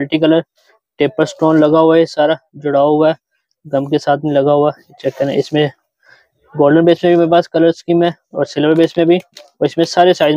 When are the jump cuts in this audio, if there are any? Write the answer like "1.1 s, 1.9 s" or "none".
none